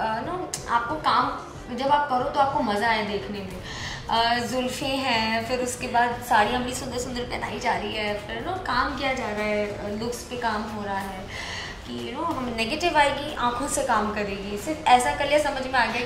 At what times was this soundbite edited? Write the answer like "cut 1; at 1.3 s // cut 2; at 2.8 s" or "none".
none

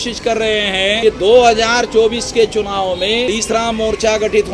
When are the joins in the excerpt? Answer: cut 1; at 1.0 s // cut 2; at 3.3 s

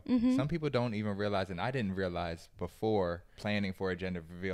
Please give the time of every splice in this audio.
cut 1; at 3.3 s

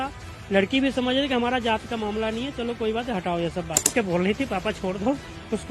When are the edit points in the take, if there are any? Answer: cut 1; at 3.9 s

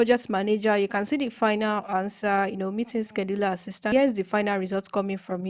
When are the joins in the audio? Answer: cut 1; at 3.9 s

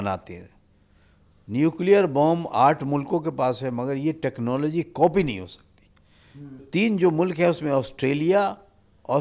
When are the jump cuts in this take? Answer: cut 1; at 6.7 s

